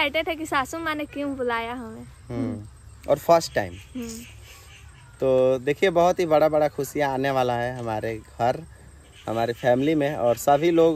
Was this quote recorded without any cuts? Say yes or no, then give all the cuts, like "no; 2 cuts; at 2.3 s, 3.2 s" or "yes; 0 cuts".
yes; 0 cuts